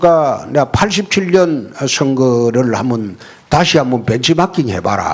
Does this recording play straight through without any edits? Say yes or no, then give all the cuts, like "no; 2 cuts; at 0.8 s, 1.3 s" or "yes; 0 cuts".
yes; 0 cuts